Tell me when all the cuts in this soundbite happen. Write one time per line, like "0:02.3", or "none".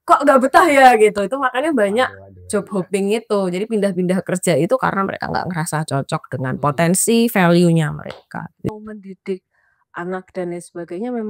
0:08.6